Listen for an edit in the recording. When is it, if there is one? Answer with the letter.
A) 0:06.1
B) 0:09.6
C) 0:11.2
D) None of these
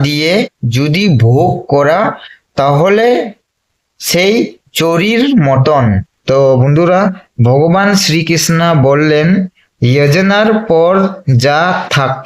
A